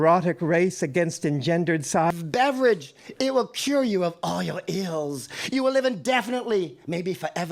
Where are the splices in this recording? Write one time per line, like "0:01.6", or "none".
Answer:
0:02.1